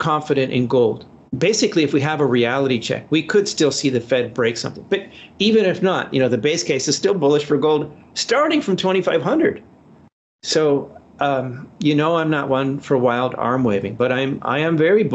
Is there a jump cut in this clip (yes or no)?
yes